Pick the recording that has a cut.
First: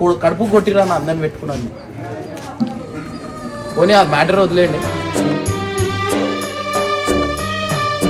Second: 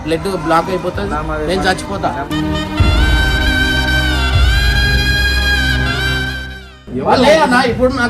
second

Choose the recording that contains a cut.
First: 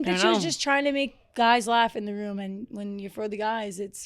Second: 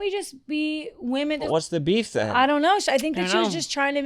second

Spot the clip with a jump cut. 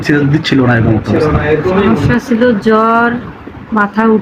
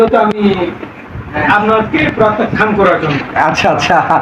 first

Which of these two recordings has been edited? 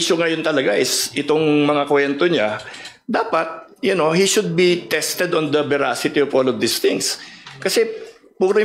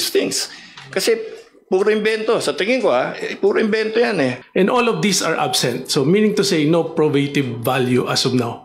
second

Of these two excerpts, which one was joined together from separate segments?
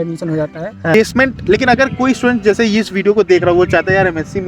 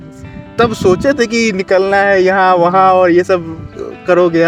first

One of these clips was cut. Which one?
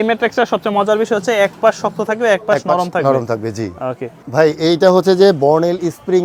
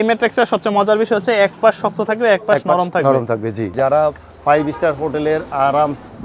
second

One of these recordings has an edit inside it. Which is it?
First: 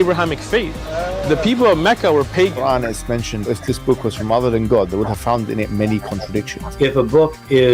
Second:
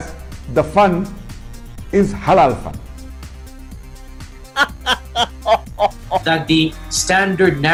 first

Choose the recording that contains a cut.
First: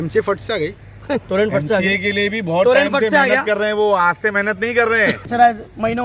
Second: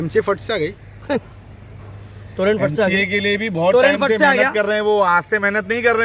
first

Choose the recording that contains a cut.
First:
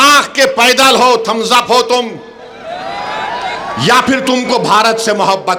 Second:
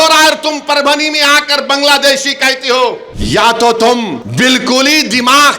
second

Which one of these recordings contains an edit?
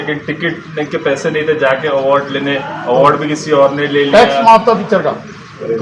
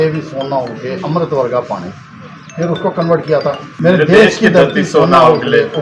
second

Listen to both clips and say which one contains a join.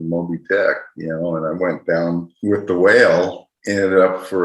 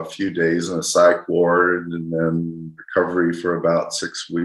first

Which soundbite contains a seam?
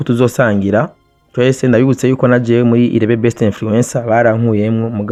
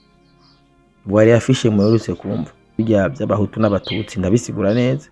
second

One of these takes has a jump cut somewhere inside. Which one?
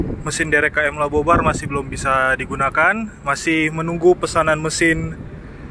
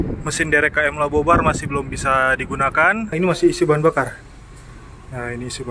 second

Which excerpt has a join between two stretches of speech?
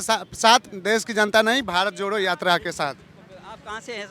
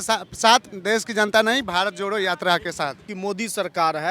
second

